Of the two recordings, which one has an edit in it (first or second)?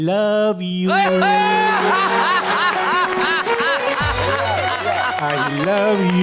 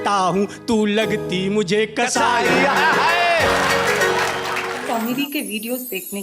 second